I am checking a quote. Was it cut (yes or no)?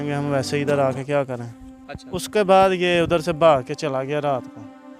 no